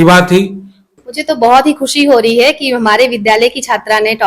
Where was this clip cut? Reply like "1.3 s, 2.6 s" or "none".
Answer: 1.1 s

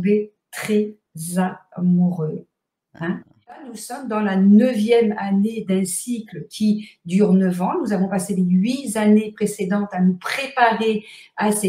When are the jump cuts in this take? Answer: 3.7 s

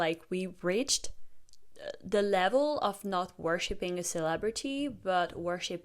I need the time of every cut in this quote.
none

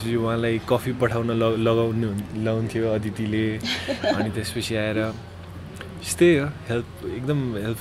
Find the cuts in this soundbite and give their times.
none

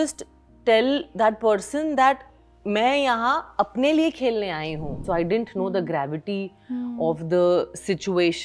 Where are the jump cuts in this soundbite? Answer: 5.0 s

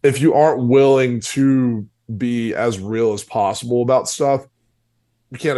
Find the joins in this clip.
none

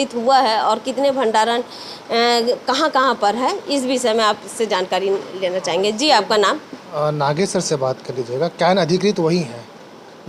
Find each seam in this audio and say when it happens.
none

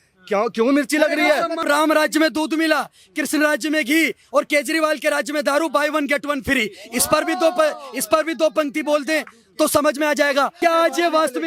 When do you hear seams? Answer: 1.6 s, 10.5 s

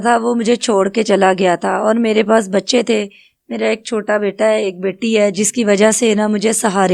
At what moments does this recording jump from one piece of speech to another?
none

